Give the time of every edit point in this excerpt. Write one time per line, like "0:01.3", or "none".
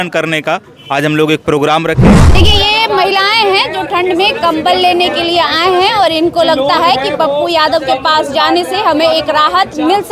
0:02.4